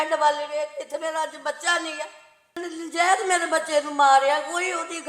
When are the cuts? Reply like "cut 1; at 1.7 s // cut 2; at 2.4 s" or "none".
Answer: cut 1; at 2.6 s